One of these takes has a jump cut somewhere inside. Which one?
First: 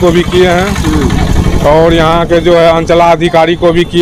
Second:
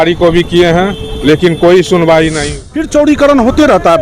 second; 1 cut; at 2.5 s

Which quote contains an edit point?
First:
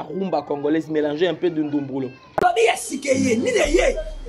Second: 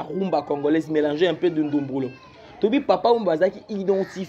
first; 1 cut; at 2.2 s

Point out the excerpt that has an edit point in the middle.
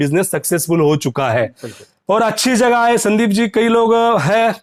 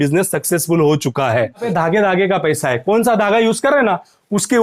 second; 1 cut; at 1.7 s

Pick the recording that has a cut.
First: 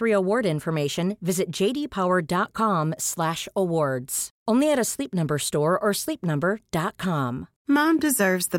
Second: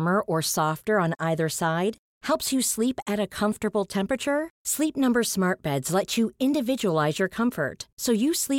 first; 1 cut; at 7.5 s

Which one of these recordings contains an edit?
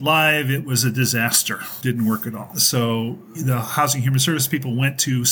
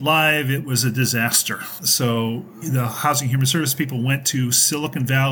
second; 1 cut; at 1.7 s

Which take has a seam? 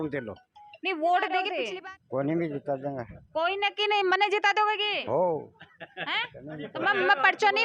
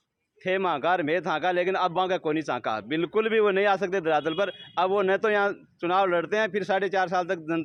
first; 1 cut; at 1.6 s

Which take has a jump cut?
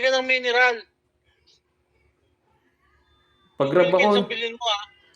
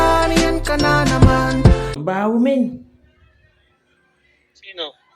second; 1 cut; at 1.9 s

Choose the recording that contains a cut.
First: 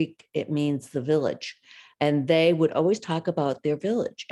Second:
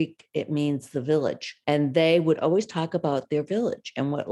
second; 1 cut; at 1.5 s

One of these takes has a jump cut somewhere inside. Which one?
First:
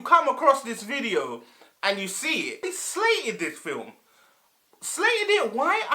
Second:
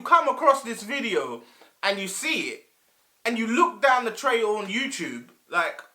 first; 1 cut; at 2.6 s

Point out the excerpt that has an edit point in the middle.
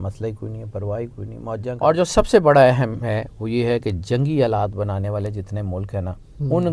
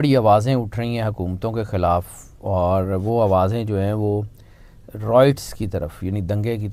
first; 1 cut; at 1.8 s

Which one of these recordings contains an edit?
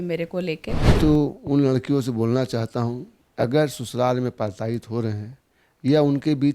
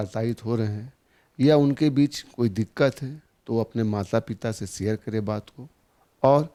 first; 1 cut; at 0.9 s

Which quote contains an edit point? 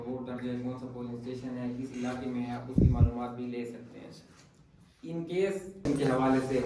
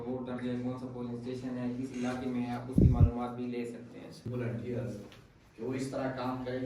second; 1 cut; at 4.3 s

